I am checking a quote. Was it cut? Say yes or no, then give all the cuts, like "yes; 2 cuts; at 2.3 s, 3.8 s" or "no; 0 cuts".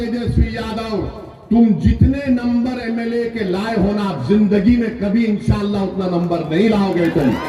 no; 0 cuts